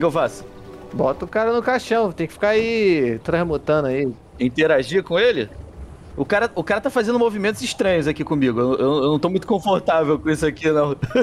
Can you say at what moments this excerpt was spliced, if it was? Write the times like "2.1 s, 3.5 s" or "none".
none